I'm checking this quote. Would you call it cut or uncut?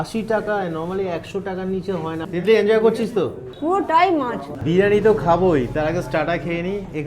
cut